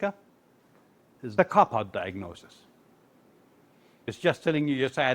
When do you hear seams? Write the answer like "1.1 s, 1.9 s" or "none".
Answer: 1.1 s, 4.1 s